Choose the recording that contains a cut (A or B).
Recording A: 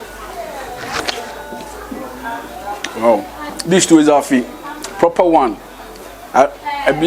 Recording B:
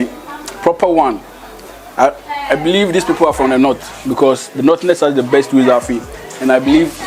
A